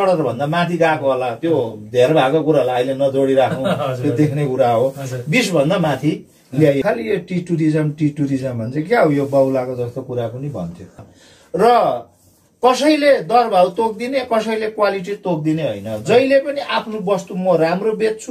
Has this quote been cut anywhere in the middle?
yes; 2 cuts; at 6.8 s, 11.0 s

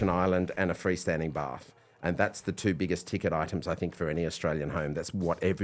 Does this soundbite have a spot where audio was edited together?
no; 0 cuts

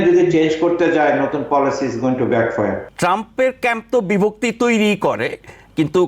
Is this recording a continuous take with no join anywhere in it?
no; 1 cut; at 2.9 s

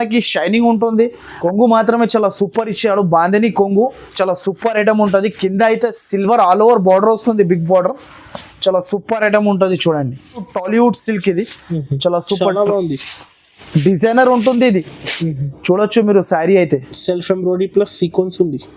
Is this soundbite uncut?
no; 2 cuts; at 1.2 s, 10.5 s

